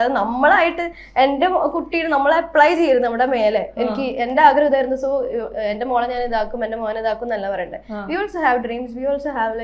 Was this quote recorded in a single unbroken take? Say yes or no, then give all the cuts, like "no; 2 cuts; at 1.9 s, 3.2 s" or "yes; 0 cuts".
yes; 0 cuts